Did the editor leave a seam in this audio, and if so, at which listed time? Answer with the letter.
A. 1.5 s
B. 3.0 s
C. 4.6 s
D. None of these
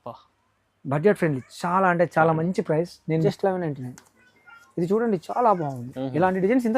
B